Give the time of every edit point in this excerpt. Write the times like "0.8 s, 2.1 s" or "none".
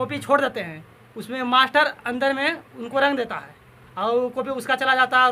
none